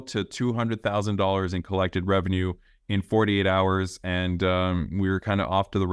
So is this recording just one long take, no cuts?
yes; 0 cuts

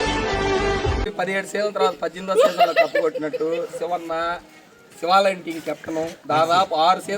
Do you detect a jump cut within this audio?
yes; 1 cut; at 1.0 s

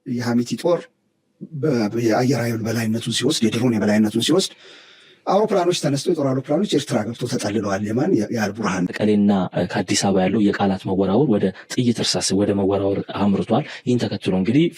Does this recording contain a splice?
yes; 1 cut; at 8.9 s

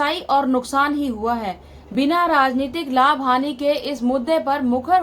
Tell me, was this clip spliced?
yes; 1 cut; at 1.7 s

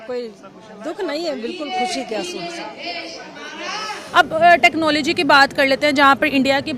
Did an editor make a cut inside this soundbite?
yes; 1 cut; at 4.0 s

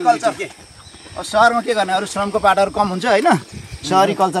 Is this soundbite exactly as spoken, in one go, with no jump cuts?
yes; 0 cuts

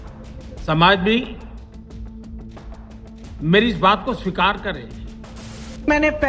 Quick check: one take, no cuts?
no; 1 cut; at 5.3 s

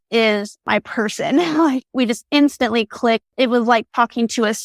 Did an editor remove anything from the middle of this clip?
yes; 1 cut; at 3.3 s

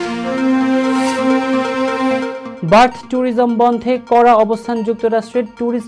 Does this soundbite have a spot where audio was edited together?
yes; 1 cut; at 2.4 s

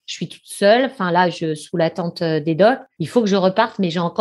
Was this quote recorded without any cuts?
no; 1 cut; at 2.9 s

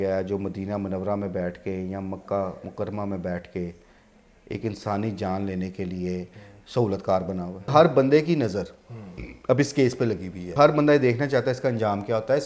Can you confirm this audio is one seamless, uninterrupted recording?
no; 2 cuts; at 7.7 s, 10.5 s

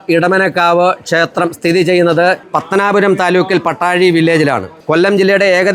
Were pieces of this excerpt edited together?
no; 0 cuts

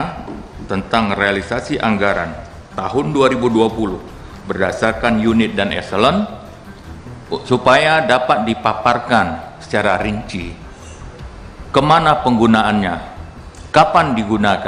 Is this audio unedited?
yes; 0 cuts

